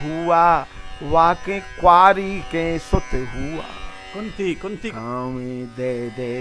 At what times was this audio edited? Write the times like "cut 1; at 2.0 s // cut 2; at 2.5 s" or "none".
cut 1; at 4.9 s